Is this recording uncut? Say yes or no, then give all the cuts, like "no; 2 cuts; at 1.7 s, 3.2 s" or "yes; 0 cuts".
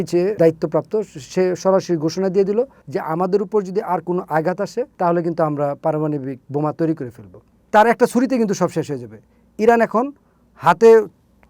no; 3 cuts; at 4.9 s, 6.4 s, 7.5 s